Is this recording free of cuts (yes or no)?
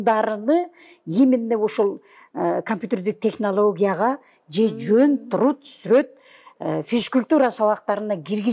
yes